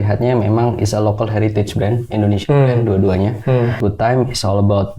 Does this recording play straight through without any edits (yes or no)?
no